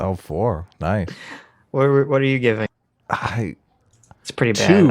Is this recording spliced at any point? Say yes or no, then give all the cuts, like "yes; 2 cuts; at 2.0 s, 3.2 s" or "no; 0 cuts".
yes; 1 cut; at 2.7 s